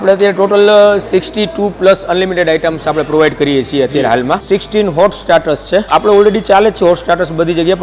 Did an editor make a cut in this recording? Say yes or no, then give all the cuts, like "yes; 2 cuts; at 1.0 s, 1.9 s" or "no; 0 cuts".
yes; 2 cuts; at 4.4 s, 5.9 s